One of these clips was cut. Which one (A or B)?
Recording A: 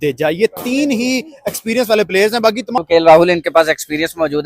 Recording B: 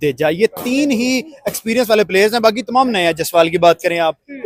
A